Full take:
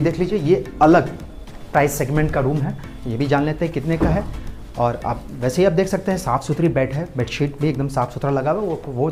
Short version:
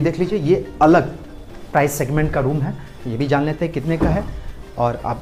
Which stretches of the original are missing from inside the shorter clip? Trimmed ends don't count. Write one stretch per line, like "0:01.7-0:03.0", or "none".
none